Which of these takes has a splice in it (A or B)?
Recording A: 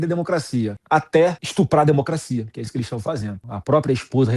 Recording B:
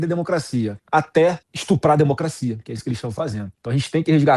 A